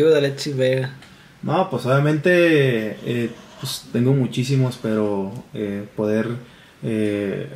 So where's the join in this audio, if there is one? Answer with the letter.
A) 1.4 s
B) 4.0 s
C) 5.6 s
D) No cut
D